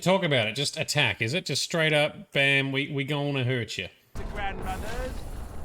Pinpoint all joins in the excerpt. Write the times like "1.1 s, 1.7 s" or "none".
4.2 s